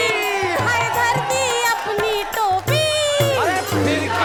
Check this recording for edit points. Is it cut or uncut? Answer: uncut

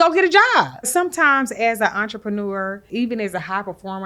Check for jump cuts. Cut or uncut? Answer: cut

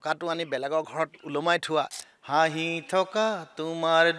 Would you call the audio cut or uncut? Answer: cut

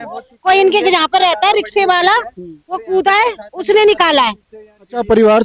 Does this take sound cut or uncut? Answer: uncut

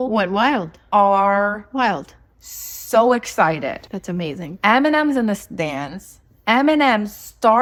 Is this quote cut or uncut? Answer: uncut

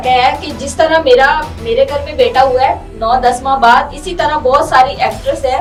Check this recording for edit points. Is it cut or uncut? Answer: uncut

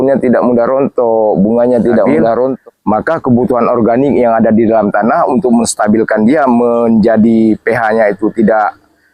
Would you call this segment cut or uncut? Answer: cut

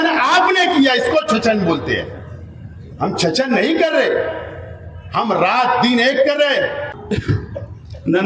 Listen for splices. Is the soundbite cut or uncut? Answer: cut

